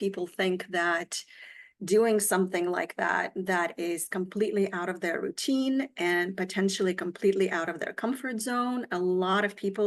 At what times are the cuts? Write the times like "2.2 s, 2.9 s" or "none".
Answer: none